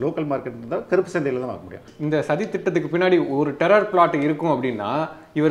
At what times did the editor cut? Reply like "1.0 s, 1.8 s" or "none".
1.9 s